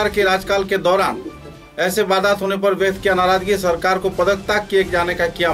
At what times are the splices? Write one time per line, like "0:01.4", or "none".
none

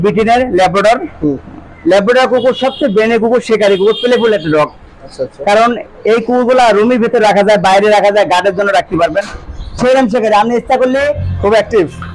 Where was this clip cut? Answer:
none

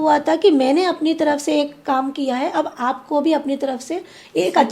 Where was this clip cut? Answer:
none

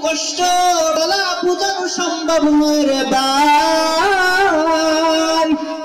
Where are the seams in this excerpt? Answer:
0:01.0

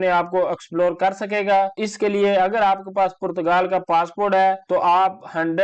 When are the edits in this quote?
none

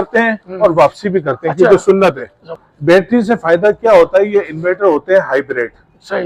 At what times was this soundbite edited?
0:02.6

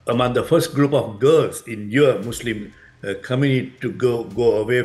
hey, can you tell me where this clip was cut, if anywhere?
none

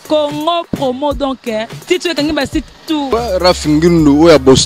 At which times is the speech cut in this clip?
0:03.1

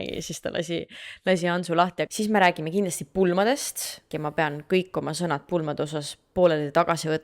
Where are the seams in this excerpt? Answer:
0:02.1
0:04.1

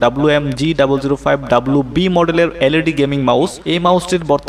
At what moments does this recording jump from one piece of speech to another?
0:03.6

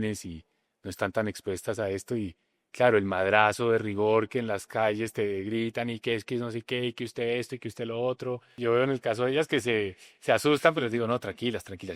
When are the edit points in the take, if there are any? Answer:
0:08.5

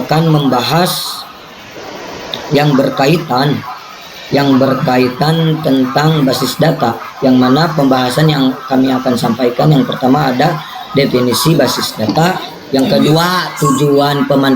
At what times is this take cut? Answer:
none

